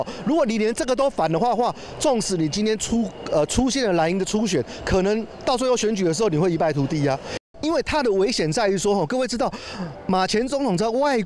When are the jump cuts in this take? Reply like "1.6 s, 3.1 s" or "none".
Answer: 7.3 s